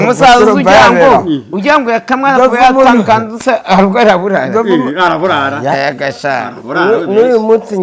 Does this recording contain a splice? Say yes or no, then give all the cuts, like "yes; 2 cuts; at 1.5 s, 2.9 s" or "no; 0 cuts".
no; 0 cuts